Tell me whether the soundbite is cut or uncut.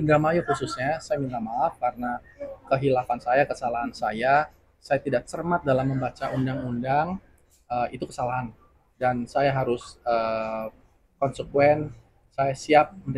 uncut